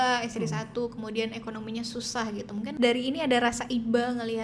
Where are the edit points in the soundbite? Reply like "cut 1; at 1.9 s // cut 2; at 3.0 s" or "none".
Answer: cut 1; at 2.7 s